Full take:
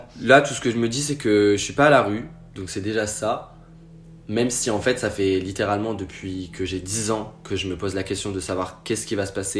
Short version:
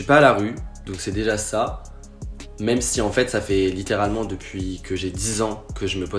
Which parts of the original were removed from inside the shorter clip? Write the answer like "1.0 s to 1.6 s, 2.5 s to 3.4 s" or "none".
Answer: none